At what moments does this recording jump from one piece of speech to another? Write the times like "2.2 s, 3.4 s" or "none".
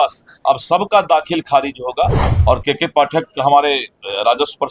2.3 s